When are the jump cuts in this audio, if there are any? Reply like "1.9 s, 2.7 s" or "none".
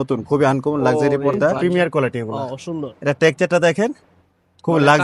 1.6 s